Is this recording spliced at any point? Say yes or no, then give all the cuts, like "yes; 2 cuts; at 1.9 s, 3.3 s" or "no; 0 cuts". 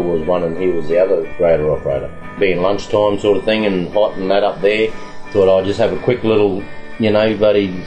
yes; 2 cuts; at 1.3 s, 2.3 s